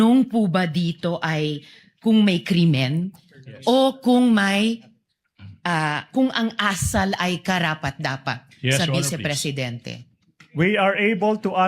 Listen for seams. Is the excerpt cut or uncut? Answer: uncut